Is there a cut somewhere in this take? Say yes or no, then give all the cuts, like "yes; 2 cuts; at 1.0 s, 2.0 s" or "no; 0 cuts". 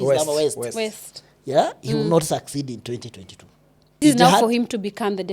yes; 1 cut; at 4.0 s